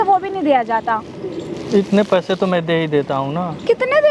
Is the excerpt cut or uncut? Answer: uncut